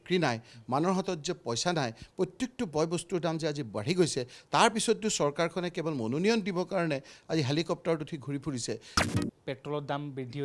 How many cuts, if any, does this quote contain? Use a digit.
1